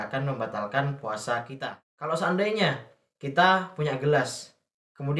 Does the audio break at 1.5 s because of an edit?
yes; 1 cut; at 1.5 s

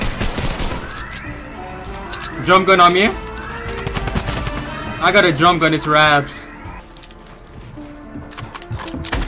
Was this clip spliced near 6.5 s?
yes; 1 cut; at 6.5 s

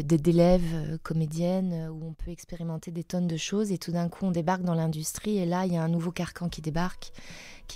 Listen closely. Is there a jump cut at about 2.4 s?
no; 0 cuts

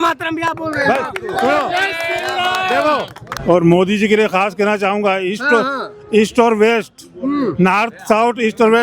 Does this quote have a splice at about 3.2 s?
yes; 1 cut; at 3.2 s

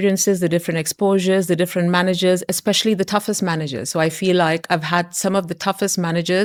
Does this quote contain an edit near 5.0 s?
no; 0 cuts

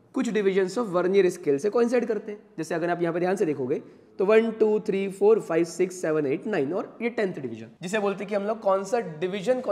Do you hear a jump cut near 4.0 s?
no; 1 cut; at 7.7 s

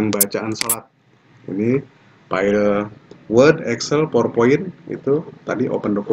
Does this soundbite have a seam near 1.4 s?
no; 0 cuts

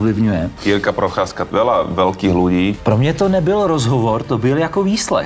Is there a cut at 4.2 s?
no; 2 cuts; at 1.4 s, 2.8 s

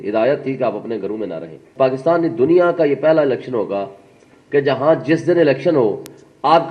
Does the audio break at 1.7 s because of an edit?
yes; 1 cut; at 1.7 s

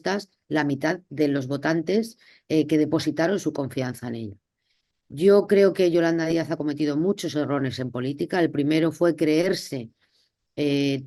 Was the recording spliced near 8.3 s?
no; 0 cuts

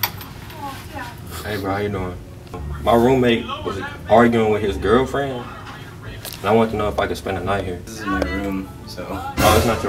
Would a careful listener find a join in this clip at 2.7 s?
yes; 2 cuts; at 2.7 s, 7.9 s

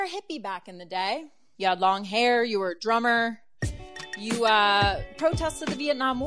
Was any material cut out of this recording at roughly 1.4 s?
yes; 1 cut; at 1.4 s

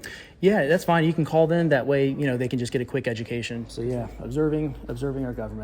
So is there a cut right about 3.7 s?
yes; 1 cut; at 3.7 s

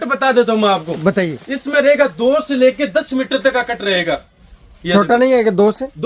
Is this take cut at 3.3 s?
no; 0 cuts

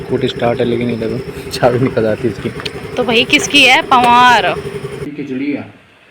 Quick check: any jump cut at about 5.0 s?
yes; 1 cut; at 5.0 s

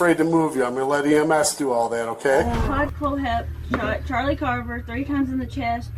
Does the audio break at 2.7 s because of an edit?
yes; 1 cut; at 2.7 s

